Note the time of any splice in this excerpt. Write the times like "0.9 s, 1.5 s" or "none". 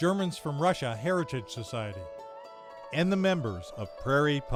none